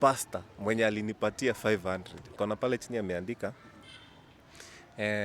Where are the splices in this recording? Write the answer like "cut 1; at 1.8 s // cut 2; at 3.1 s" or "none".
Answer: cut 1; at 2.2 s